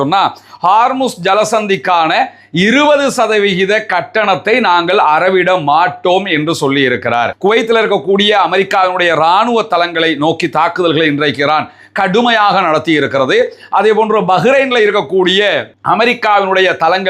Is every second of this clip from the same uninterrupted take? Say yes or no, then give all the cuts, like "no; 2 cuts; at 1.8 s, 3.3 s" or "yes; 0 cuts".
no; 1 cut; at 7.3 s